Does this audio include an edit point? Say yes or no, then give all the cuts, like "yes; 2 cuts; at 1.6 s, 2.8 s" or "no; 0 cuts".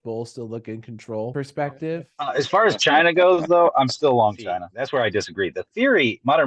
yes; 2 cuts; at 2.1 s, 4.7 s